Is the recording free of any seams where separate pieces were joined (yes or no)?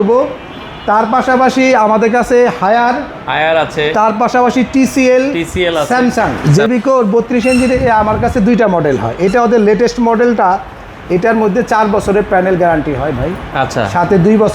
no